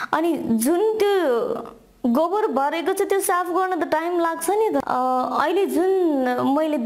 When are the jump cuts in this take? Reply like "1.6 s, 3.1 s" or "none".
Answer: 4.8 s